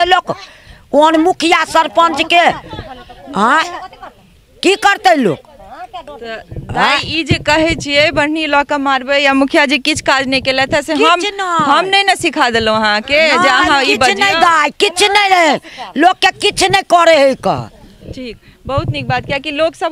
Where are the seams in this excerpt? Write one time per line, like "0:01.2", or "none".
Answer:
none